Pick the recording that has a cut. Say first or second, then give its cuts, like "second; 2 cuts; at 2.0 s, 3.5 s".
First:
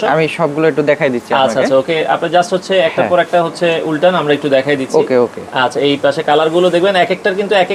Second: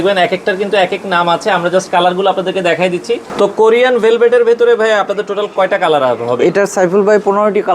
second; 1 cut; at 3.3 s